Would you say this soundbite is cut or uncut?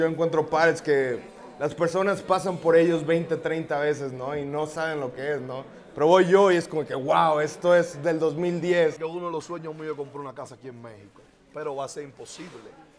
cut